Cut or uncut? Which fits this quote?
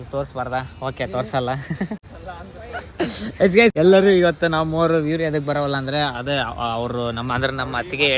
uncut